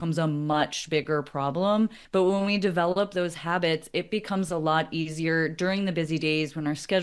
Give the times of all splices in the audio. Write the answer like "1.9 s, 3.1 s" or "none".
2.0 s